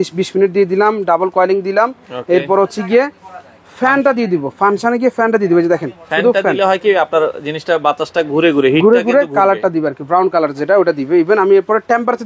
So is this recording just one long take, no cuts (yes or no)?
yes